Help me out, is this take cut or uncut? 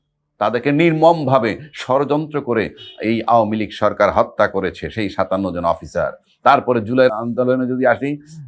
cut